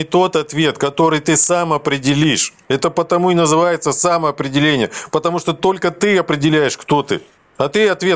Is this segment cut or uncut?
uncut